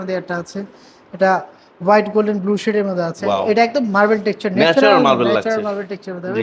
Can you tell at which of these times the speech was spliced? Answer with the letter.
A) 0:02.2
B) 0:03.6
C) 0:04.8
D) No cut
D